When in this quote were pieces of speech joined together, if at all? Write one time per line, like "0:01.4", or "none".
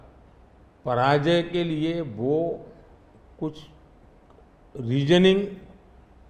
none